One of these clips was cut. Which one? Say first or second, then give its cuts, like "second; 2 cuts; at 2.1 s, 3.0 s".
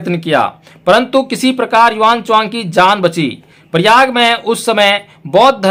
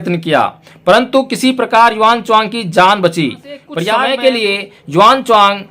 second; 1 cut; at 3.6 s